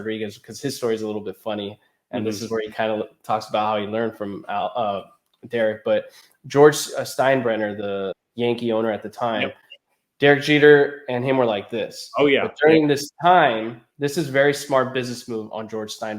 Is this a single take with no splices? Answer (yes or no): no